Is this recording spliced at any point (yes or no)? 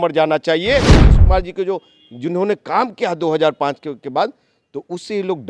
yes